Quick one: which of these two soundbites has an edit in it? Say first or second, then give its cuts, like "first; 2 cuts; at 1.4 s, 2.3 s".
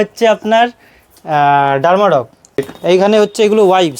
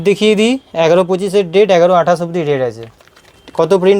first; 1 cut; at 2.7 s